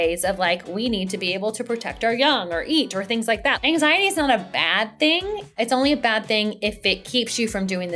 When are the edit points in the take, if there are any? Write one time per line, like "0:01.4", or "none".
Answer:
0:03.6
0:05.5